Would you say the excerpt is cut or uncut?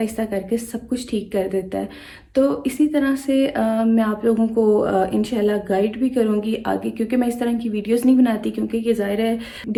uncut